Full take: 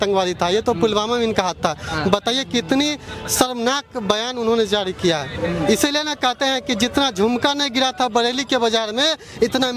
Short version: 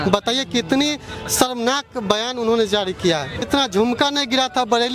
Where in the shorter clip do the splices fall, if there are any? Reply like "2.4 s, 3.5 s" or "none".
3.5 s